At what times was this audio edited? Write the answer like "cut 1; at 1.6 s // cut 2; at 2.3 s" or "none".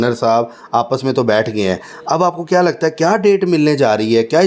none